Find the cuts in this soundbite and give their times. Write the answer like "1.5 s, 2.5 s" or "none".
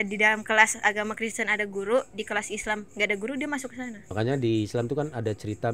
4.0 s